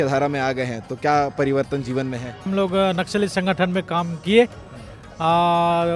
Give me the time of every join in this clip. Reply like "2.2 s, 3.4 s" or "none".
2.5 s